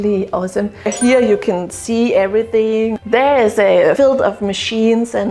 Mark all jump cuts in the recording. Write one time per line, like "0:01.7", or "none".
0:00.9
0:02.9

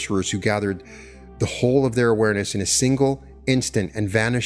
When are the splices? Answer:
none

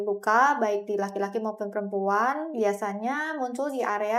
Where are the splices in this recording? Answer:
none

